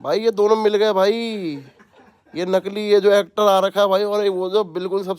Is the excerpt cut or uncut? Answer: uncut